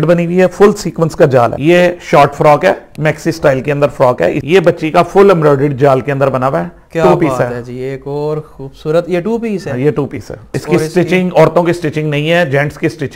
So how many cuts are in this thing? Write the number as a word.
three